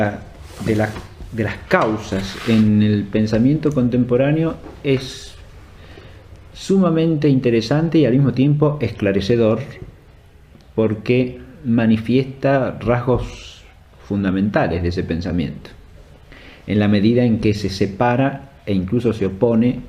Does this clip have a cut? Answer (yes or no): no